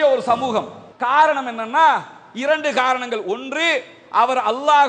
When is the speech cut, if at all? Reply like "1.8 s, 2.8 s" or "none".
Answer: 0.9 s